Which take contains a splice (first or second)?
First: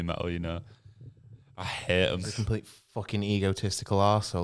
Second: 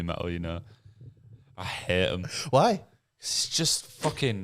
first